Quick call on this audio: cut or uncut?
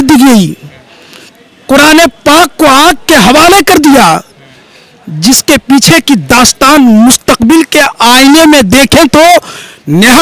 uncut